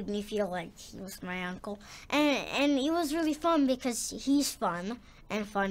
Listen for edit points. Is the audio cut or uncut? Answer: uncut